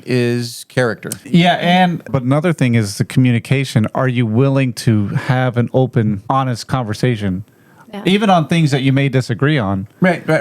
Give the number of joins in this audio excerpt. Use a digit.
3